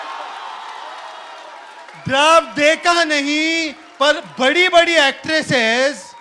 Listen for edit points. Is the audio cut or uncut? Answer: uncut